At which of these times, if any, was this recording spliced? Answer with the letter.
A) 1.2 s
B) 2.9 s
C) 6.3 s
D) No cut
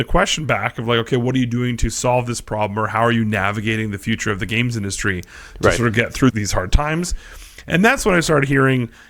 C